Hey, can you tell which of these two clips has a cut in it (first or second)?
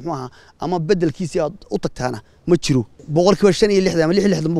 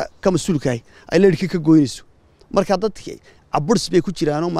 first